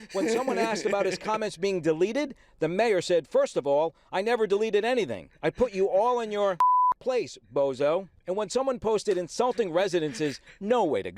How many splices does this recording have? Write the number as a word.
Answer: two